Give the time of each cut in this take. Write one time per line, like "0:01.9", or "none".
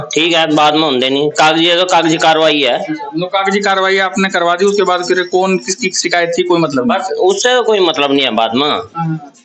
none